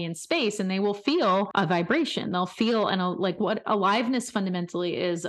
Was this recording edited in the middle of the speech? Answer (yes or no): yes